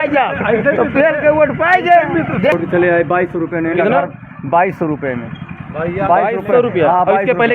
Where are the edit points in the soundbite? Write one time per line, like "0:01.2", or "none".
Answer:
0:02.5